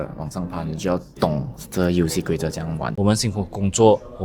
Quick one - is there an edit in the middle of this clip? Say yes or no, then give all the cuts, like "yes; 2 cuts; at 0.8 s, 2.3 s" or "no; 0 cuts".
yes; 1 cut; at 2.9 s